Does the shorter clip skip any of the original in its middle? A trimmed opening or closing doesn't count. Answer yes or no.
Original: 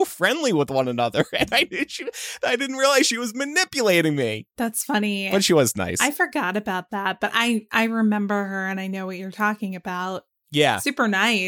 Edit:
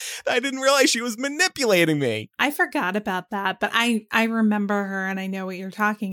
yes